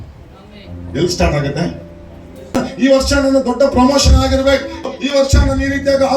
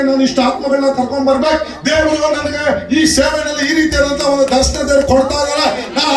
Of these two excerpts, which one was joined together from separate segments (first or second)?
first